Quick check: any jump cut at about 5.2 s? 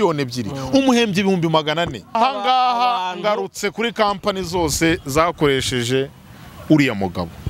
no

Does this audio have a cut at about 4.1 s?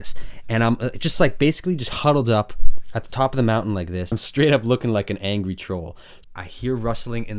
yes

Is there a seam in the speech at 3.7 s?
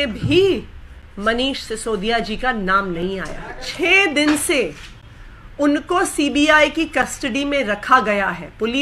yes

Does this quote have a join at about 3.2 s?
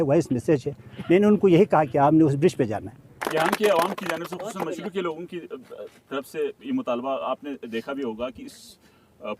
yes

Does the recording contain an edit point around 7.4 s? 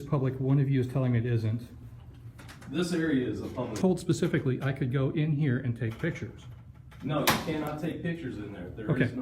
no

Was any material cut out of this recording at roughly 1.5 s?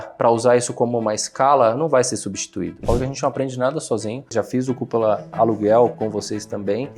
no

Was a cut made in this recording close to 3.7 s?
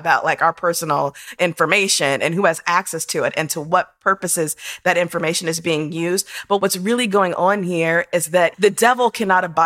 no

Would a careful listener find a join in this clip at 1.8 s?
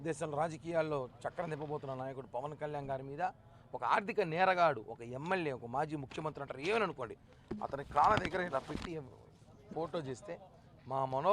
yes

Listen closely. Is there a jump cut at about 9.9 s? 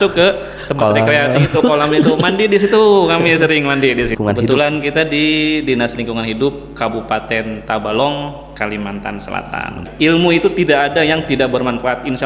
yes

